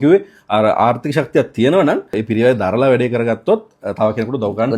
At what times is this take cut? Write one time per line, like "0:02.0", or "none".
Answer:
0:02.2

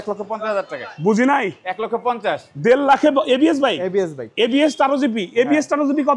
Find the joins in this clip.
none

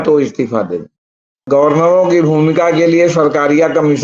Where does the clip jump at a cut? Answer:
0:01.5

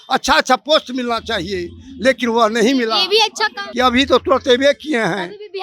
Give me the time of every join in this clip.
0:03.6

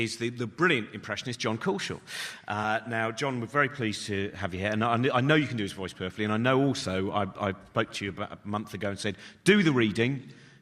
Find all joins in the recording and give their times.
0:04.8

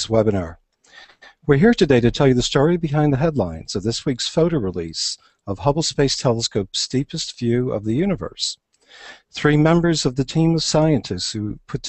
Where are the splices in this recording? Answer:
none

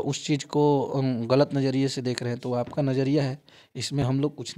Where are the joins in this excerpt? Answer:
none

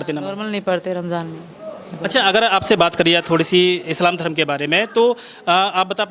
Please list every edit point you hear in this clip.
none

